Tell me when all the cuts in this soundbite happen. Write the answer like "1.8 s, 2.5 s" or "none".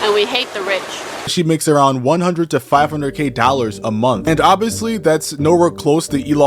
1.3 s, 4.2 s